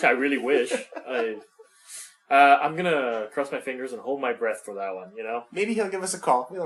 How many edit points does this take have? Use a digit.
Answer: 0